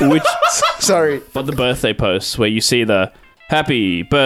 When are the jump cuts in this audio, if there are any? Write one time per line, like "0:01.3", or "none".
0:01.3